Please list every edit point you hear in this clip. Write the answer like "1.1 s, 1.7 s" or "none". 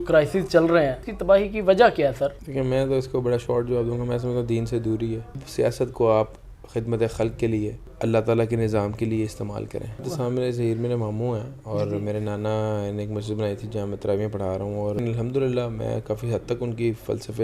1.1 s, 2.4 s, 5.4 s, 7.8 s, 10.1 s, 15.0 s